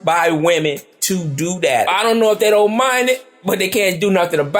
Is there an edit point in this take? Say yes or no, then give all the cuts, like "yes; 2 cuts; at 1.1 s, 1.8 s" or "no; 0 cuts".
yes; 1 cut; at 1.9 s